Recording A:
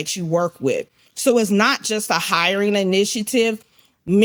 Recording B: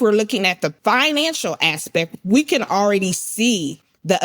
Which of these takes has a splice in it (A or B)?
B